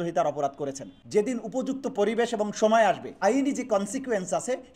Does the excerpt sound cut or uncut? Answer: cut